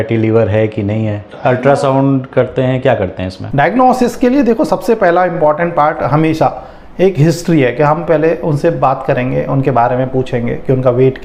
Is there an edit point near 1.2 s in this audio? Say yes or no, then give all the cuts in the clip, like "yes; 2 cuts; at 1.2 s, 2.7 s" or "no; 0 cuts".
no; 0 cuts